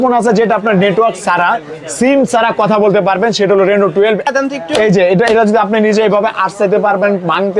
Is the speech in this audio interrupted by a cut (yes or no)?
yes